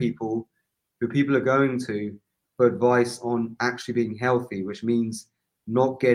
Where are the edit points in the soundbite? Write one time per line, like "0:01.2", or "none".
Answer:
none